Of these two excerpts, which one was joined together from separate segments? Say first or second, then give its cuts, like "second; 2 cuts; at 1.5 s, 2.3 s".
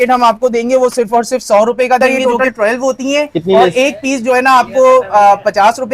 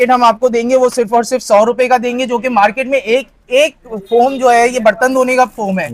first; 1 cut; at 2.0 s